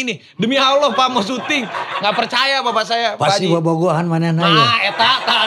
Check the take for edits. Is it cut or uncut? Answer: uncut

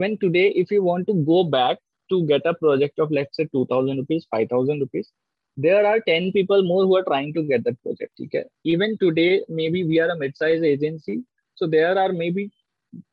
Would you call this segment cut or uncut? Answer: cut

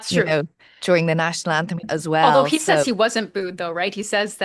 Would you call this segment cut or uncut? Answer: cut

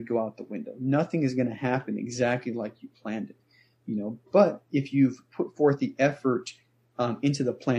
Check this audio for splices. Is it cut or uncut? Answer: uncut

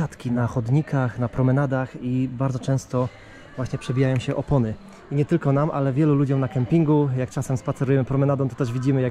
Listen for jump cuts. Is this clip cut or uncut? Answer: uncut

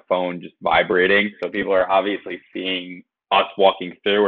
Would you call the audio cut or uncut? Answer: cut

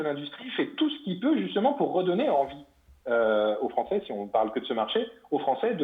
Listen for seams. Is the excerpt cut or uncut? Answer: uncut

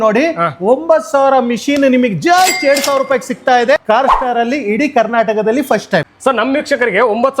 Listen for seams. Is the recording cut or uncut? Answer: cut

